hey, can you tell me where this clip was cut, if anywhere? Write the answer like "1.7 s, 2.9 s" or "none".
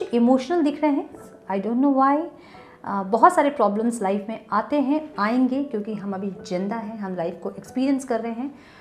1.2 s